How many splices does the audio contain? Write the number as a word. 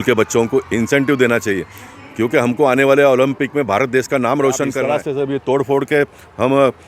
one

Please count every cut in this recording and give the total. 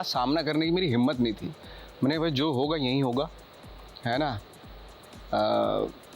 zero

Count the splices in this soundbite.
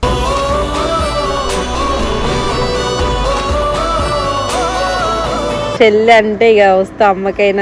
one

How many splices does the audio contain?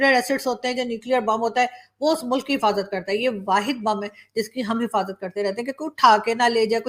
zero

